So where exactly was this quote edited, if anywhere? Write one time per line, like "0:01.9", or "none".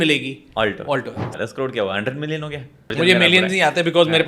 0:01.3
0:02.9